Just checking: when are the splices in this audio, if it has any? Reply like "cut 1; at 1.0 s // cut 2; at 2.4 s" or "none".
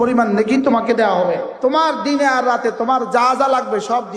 cut 1; at 1.5 s